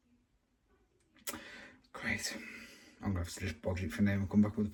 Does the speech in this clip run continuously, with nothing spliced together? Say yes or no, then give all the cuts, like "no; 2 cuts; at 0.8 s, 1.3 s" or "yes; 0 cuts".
yes; 0 cuts